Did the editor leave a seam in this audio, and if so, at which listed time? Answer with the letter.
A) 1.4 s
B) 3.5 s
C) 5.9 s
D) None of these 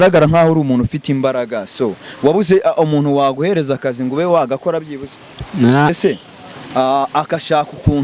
C